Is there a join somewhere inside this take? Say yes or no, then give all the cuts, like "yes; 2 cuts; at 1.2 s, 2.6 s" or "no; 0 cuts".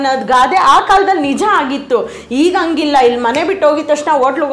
no; 0 cuts